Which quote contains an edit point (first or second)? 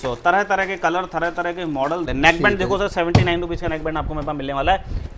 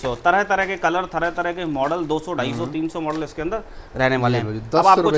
first